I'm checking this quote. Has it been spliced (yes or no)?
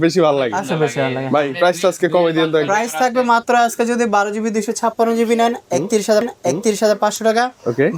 no